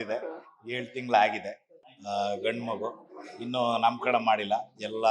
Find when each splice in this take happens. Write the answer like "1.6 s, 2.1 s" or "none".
1.9 s